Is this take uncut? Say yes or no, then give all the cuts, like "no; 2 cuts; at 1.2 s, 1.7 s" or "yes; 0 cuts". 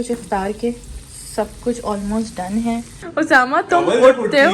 no; 1 cut; at 3.0 s